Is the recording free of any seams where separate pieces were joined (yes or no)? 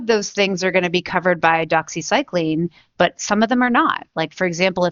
yes